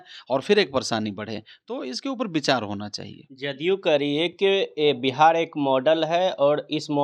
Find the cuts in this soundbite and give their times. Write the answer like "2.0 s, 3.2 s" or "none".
none